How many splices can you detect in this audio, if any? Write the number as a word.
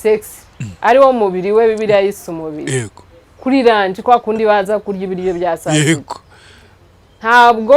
zero